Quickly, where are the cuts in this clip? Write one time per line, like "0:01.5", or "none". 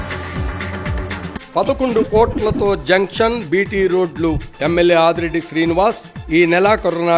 0:00.9